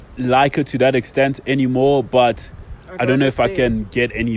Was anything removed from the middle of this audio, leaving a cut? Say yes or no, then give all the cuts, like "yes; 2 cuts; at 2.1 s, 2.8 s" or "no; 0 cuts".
no; 0 cuts